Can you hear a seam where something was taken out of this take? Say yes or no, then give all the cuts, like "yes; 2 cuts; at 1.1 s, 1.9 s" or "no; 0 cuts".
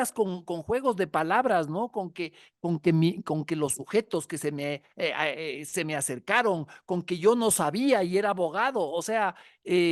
no; 0 cuts